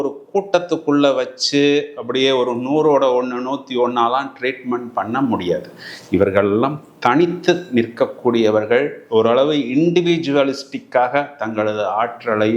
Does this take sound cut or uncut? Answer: uncut